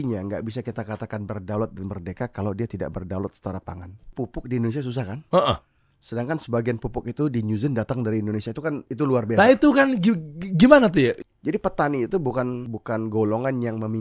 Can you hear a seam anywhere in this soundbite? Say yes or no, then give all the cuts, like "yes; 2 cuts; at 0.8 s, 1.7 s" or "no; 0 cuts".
yes; 3 cuts; at 4.1 s, 11.3 s, 12.7 s